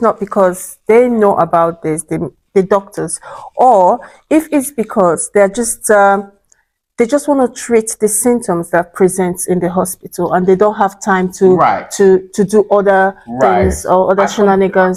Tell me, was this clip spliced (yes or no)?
no